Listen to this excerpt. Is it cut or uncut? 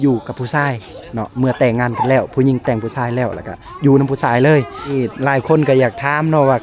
cut